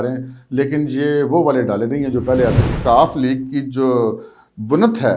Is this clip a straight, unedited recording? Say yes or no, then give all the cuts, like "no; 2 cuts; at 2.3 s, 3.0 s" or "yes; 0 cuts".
no; 1 cut; at 2.7 s